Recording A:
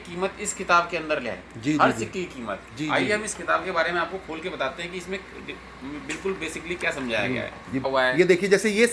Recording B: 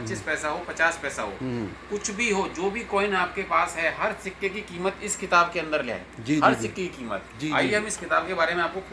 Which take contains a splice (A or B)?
A